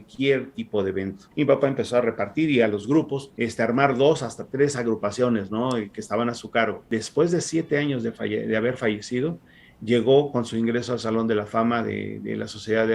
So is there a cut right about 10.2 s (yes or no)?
no